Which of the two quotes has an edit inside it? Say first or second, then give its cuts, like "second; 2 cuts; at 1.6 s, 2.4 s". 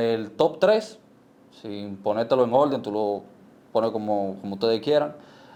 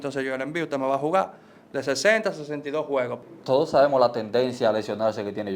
second; 1 cut; at 3.3 s